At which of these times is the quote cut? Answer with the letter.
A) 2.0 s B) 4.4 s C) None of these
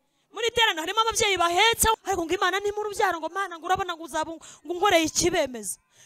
A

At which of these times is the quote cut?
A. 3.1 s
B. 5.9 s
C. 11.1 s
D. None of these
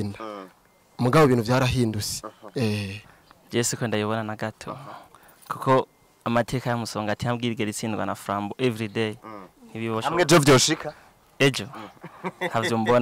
A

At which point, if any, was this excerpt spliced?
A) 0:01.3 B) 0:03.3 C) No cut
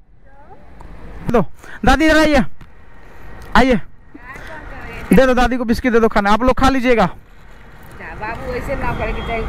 A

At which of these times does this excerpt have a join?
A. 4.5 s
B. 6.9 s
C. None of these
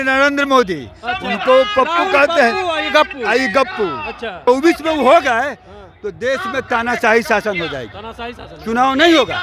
A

